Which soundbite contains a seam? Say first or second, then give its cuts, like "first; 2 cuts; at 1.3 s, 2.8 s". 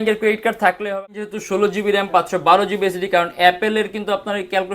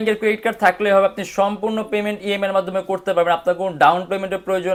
first; 1 cut; at 1.2 s